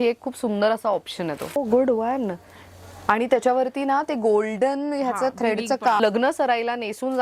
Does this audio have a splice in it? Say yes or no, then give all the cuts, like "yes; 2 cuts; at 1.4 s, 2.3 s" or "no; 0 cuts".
yes; 2 cuts; at 1.6 s, 6.0 s